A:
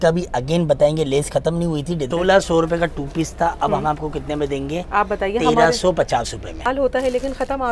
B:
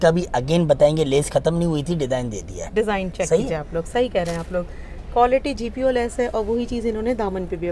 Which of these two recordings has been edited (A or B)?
A